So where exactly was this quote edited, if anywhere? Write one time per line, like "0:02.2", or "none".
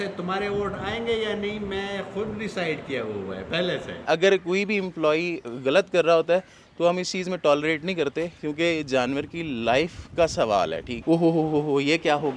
0:04.1
0:11.0